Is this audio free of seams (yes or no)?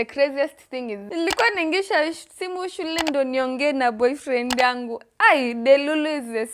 no